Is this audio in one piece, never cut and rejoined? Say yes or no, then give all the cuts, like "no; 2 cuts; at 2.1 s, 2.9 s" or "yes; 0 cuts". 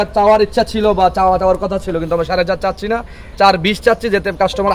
yes; 0 cuts